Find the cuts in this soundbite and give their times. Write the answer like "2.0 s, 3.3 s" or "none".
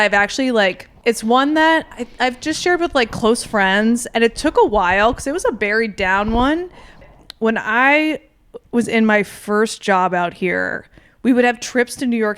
0.9 s, 2.0 s, 7.0 s